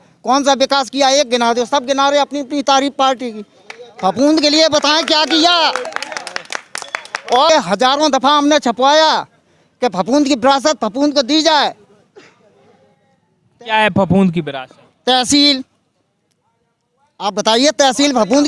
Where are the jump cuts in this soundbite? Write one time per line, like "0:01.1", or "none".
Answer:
0:07.5